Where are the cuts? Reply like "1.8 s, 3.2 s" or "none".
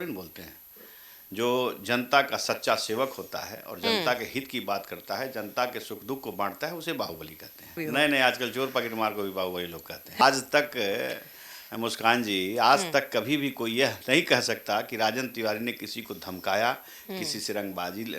7.8 s, 10.2 s